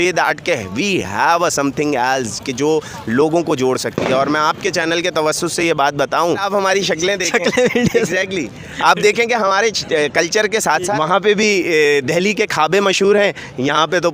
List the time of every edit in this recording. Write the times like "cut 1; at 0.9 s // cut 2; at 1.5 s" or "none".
cut 1; at 6.5 s // cut 2; at 10.9 s